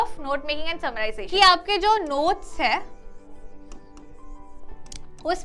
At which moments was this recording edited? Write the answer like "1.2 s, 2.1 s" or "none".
1.2 s